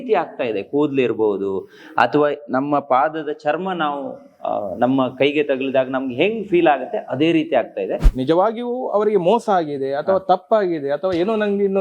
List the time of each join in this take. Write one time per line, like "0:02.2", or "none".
0:08.1